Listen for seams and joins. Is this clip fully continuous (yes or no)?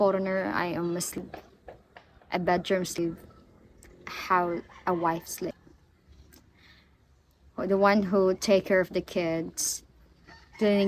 no